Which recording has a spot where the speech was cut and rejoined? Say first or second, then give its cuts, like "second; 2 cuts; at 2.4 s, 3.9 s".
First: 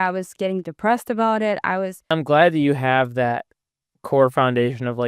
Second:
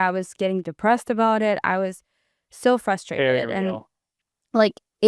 first; 1 cut; at 2.0 s